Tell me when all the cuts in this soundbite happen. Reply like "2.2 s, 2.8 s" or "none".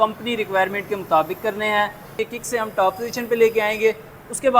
2.2 s